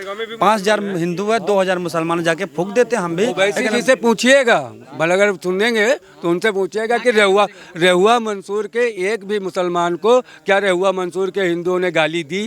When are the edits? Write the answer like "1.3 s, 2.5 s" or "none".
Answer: none